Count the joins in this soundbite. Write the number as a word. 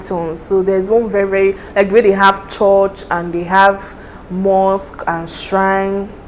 zero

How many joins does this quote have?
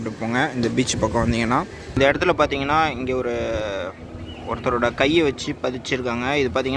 one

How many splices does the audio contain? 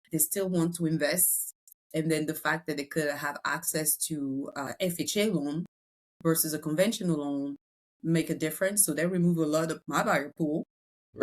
two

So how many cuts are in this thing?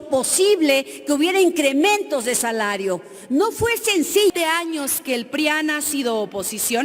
one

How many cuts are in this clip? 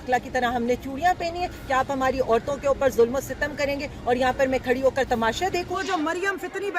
one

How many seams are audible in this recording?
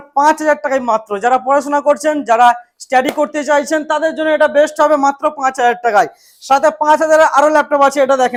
zero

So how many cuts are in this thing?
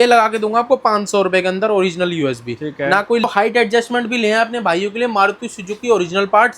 one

